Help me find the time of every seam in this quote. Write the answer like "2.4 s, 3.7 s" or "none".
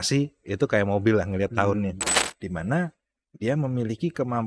2.1 s